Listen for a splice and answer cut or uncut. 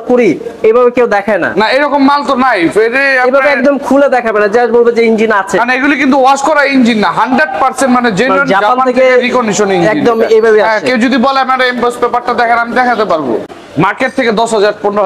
cut